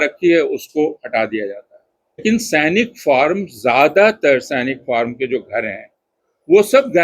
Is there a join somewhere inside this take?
yes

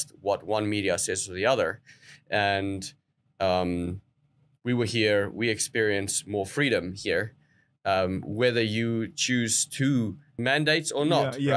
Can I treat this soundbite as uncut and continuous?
no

